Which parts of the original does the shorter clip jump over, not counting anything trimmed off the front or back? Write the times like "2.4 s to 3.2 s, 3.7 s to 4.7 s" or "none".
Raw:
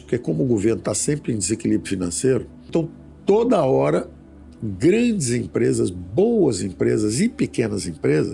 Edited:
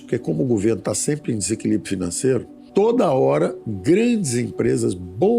2.6 s to 3.1 s, 4.2 s to 4.6 s